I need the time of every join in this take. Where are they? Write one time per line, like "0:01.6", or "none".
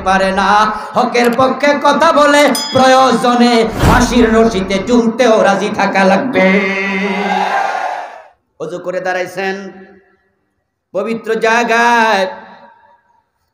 0:08.0